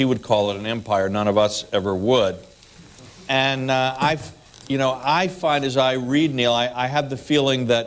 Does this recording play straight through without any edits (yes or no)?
no